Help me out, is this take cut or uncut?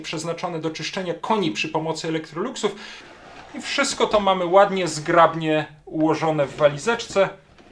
cut